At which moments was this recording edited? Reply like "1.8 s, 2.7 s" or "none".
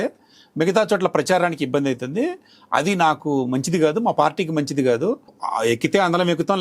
5.3 s